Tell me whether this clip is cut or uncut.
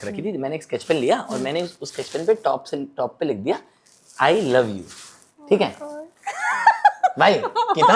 uncut